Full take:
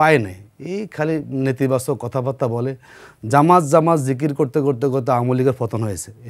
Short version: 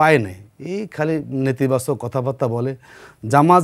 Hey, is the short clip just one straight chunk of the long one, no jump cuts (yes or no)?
yes